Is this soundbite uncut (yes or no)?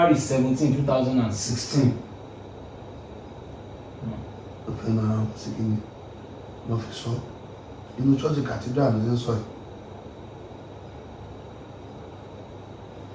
yes